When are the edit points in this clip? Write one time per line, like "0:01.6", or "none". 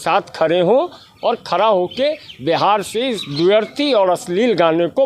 none